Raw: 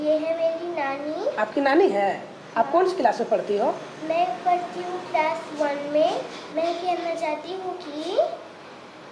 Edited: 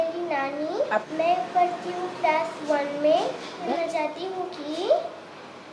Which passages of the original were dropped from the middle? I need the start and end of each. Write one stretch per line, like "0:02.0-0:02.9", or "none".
0:01.5-0:03.9
0:06.6-0:06.9